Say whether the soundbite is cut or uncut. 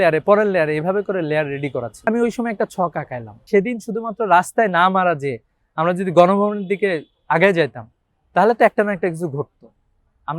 cut